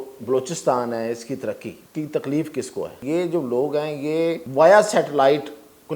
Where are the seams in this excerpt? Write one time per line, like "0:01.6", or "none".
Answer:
0:01.8
0:03.0
0:04.4